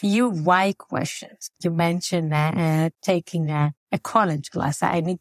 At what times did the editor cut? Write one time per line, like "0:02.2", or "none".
none